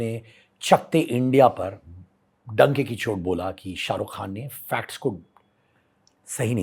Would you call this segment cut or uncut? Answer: uncut